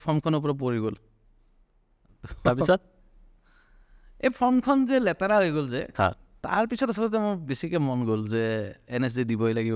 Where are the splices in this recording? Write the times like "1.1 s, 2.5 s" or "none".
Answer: none